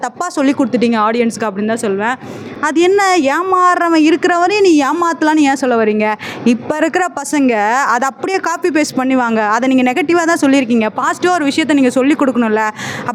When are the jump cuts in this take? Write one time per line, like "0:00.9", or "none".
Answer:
none